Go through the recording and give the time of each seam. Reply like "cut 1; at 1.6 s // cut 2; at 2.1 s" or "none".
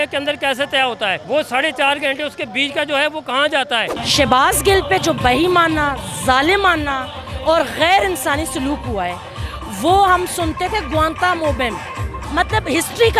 cut 1; at 1.2 s // cut 2; at 3.9 s // cut 3; at 12.2 s